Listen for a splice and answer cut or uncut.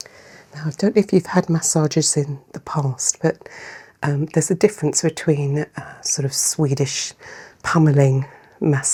uncut